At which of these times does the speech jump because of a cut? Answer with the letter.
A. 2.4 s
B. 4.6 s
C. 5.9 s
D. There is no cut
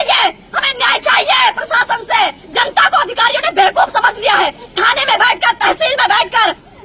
A